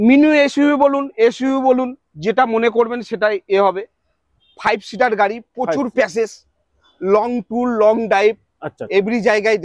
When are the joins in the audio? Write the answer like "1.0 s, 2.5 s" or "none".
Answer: none